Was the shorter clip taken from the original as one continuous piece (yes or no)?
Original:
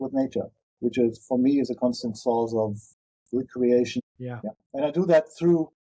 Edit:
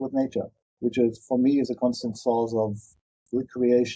yes